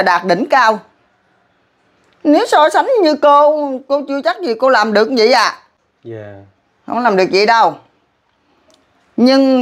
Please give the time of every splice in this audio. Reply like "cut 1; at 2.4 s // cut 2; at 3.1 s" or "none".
none